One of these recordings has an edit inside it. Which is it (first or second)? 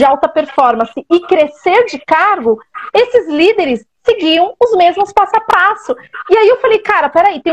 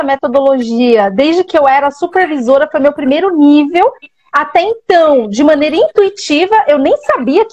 first